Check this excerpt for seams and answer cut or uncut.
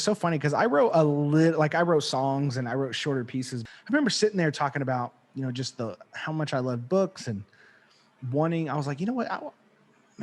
cut